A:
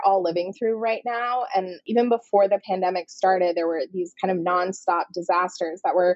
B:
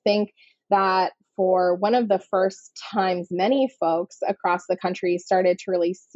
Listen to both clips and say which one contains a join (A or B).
A